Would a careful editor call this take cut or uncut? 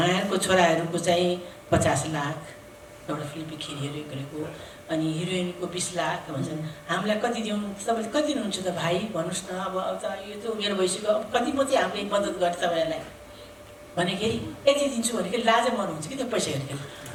uncut